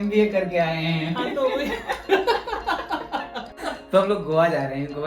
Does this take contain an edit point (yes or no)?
yes